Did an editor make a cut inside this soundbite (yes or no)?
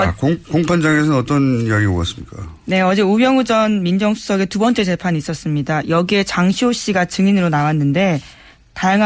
yes